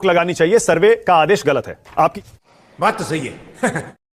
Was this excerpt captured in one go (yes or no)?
no